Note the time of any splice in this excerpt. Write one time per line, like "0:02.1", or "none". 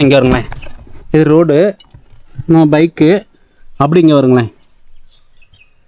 none